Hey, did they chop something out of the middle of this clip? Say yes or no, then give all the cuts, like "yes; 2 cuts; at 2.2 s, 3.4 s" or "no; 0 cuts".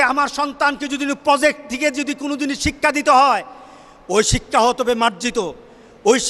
no; 0 cuts